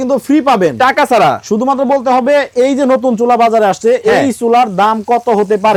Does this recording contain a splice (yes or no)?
no